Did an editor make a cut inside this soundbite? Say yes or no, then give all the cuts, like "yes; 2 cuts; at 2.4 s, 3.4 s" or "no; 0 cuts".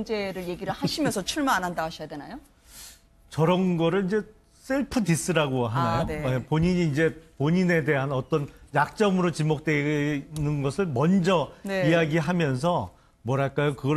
yes; 1 cut; at 6.4 s